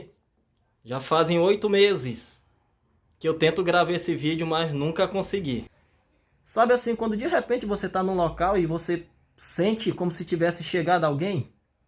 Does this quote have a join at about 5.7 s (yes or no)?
yes